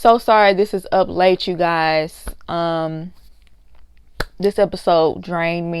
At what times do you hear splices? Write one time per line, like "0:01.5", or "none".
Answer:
none